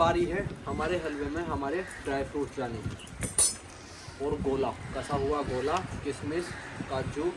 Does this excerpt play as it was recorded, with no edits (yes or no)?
yes